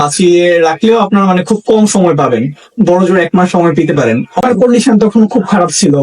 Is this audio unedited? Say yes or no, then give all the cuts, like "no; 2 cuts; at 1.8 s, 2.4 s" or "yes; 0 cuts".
no; 1 cut; at 4.4 s